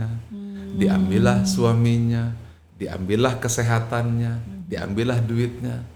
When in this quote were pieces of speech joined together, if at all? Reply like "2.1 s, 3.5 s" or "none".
none